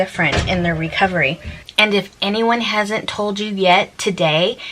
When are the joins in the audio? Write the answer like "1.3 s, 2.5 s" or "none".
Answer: 1.5 s